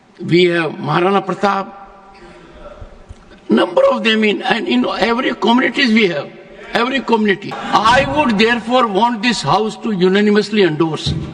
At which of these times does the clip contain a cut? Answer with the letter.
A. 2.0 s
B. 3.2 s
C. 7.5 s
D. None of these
C